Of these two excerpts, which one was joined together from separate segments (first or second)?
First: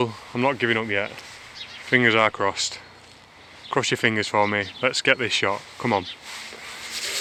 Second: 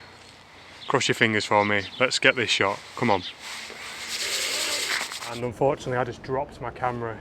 second